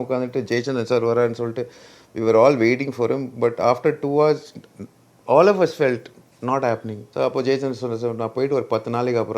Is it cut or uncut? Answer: cut